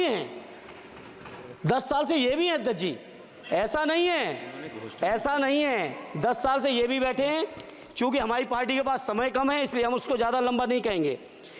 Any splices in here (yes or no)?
no